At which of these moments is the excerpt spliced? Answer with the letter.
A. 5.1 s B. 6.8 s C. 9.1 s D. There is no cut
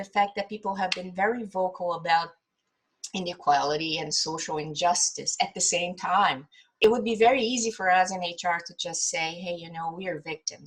B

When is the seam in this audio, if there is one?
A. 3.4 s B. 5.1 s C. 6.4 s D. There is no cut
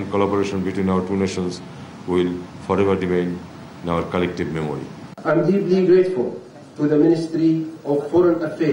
B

